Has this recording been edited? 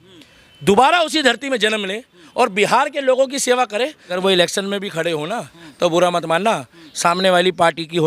yes; 1 cut; at 4.2 s

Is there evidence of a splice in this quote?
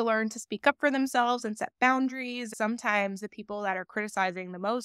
yes; 1 cut; at 2.5 s

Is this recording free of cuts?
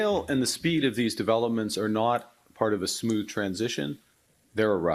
yes; 0 cuts

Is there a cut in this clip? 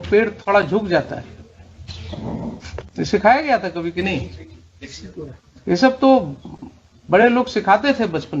yes; 1 cut; at 2.9 s

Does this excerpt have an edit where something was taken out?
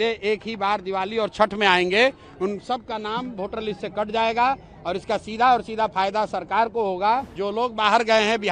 yes; 1 cut; at 7.4 s

